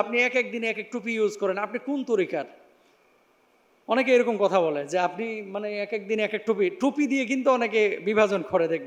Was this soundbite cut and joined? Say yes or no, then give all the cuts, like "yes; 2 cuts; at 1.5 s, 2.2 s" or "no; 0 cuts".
no; 0 cuts